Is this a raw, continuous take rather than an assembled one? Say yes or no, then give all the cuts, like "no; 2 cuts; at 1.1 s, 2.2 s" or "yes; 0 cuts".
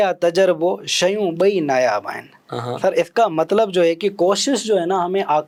yes; 0 cuts